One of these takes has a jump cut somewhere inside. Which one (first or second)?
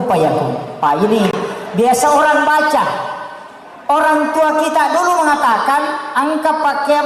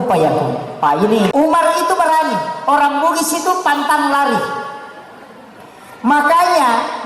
second